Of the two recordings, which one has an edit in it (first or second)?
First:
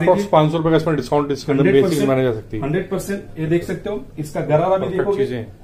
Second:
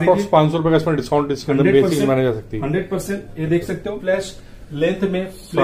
second